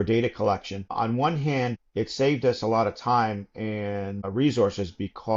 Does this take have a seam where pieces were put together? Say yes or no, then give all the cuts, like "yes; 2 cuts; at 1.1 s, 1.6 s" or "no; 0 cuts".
yes; 3 cuts; at 0.9 s, 1.8 s, 4.3 s